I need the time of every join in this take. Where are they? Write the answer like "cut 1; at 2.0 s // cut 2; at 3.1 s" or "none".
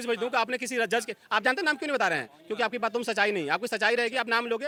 none